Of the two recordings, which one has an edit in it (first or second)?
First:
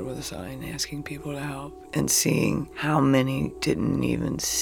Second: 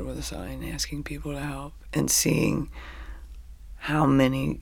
first